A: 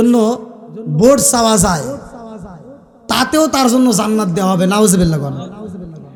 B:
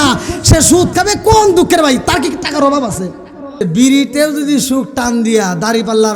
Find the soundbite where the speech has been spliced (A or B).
B